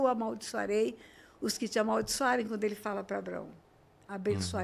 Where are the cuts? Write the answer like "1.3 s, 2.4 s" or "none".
none